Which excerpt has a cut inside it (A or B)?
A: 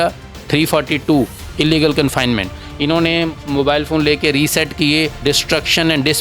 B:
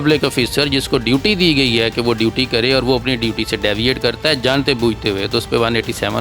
A